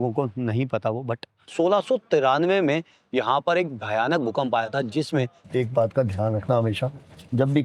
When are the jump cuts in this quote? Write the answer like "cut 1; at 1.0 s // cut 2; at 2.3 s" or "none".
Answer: cut 1; at 1.4 s // cut 2; at 5.4 s